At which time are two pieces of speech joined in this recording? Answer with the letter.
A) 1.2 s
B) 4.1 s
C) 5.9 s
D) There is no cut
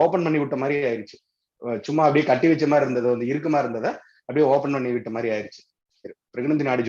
C